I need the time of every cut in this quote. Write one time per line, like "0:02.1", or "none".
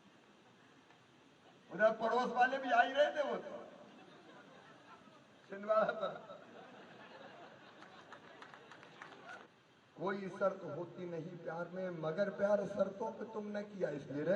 0:09.5